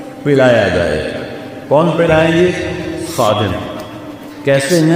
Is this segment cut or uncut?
uncut